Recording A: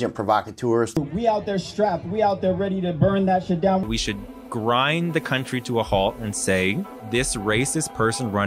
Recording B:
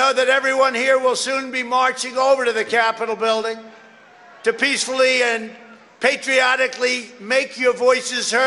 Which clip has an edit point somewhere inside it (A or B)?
A